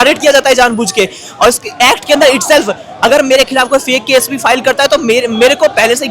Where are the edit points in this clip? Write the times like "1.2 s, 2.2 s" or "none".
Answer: none